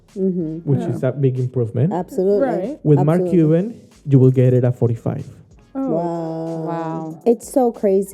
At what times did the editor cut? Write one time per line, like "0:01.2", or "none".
0:07.2